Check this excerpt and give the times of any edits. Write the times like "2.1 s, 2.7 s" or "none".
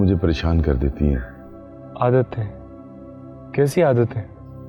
none